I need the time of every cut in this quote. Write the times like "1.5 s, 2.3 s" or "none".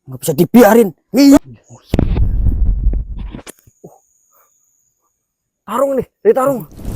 1.4 s

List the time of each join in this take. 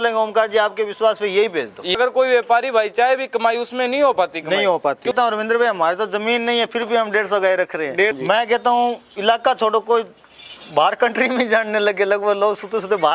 2.0 s, 5.1 s, 8.1 s

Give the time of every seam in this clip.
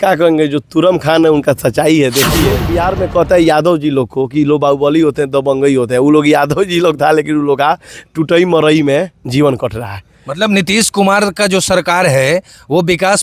2.6 s

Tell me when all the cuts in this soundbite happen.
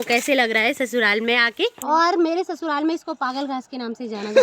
1.8 s

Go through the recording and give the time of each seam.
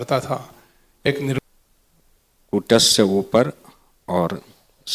1.4 s

